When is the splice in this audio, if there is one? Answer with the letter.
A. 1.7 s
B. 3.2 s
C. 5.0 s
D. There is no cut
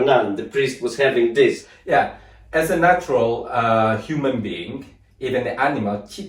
A